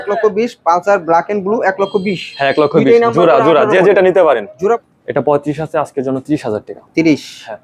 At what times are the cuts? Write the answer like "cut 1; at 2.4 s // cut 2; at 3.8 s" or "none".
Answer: cut 1; at 4.5 s